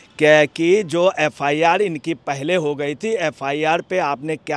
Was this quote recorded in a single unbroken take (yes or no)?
yes